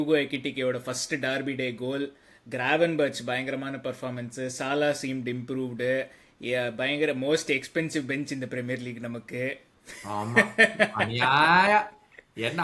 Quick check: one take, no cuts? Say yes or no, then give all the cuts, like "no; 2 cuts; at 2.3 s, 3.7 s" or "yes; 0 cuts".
yes; 0 cuts